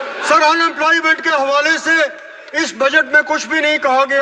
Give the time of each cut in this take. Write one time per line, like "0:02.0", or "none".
none